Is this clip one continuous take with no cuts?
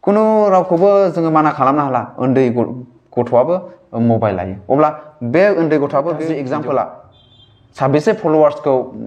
no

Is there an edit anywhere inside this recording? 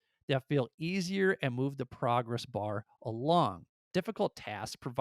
yes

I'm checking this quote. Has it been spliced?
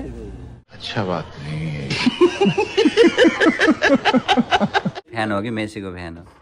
yes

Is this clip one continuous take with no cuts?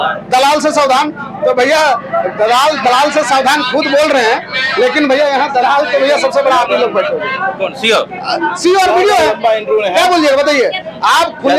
yes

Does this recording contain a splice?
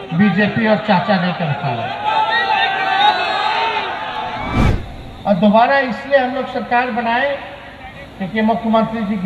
yes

